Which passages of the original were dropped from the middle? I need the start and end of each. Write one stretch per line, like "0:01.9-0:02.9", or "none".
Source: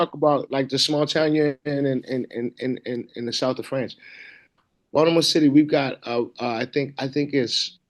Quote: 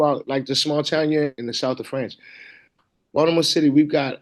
0:01.6-0:03.1